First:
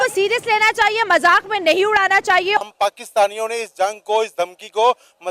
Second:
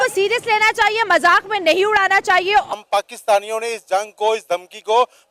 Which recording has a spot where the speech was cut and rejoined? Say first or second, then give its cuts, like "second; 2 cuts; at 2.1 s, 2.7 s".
first; 1 cut; at 2.6 s